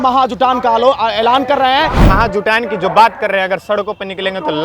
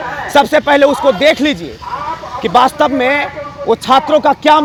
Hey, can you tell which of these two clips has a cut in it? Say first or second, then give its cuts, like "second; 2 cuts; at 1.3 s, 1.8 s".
first; 1 cut; at 2.0 s